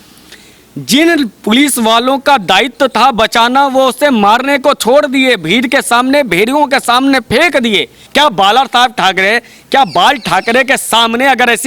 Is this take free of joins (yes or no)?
no